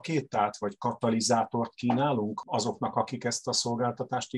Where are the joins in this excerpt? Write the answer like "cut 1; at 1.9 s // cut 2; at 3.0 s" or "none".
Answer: cut 1; at 2.4 s